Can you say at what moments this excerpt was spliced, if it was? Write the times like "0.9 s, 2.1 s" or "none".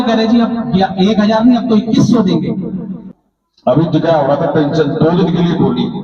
3.0 s